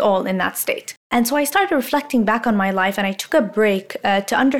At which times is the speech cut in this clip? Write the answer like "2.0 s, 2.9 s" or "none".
1.1 s

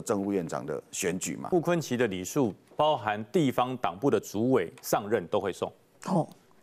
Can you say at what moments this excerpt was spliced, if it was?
1.4 s

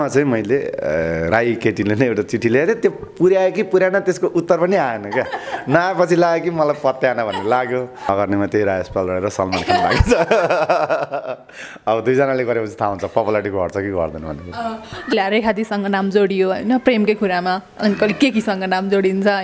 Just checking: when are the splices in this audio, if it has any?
8.1 s, 15.1 s

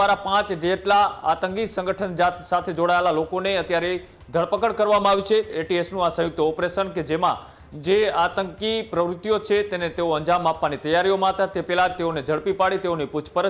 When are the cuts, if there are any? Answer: 5.6 s

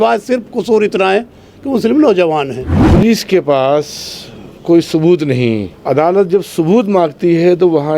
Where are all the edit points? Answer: 2.8 s, 5.7 s

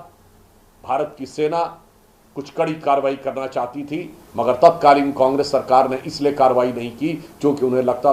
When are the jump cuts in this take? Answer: none

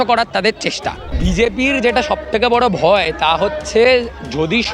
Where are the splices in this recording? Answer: 1.1 s

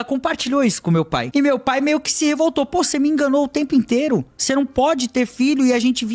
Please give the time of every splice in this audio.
1.3 s, 4.4 s

